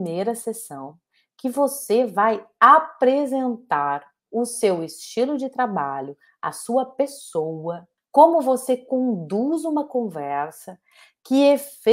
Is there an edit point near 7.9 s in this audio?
yes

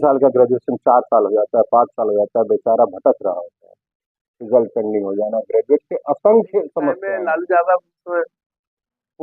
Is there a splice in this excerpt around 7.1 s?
yes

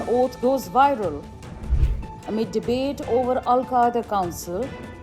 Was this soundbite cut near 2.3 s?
no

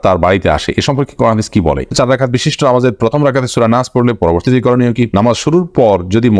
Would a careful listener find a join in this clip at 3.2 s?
no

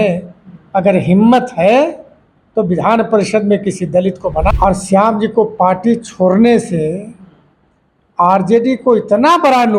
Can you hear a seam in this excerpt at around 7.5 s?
no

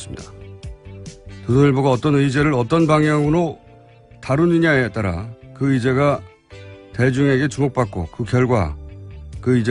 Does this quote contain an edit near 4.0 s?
yes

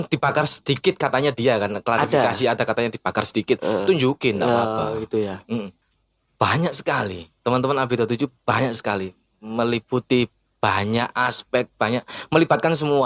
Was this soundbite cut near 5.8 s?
yes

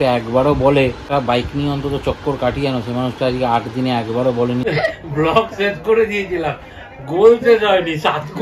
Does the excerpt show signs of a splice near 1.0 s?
yes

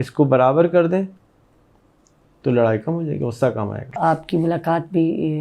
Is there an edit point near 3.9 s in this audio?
yes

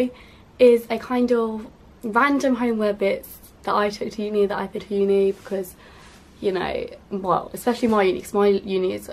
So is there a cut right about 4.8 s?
no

